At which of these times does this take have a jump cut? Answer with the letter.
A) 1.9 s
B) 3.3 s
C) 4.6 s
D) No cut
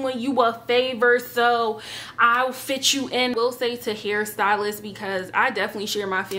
B